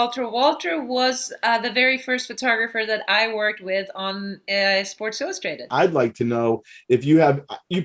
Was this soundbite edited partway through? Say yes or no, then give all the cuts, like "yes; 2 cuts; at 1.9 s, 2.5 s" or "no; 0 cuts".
yes; 1 cut; at 5.6 s